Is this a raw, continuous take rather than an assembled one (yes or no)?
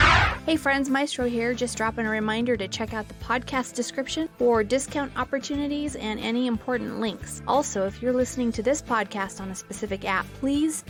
yes